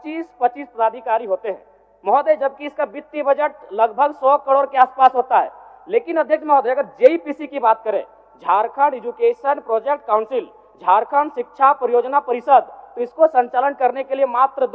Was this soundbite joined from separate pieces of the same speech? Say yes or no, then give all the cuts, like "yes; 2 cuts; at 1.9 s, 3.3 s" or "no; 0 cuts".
no; 0 cuts